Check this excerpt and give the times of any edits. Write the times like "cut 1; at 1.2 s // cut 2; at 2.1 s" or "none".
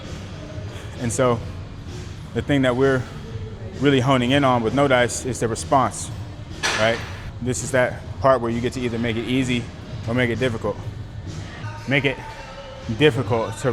none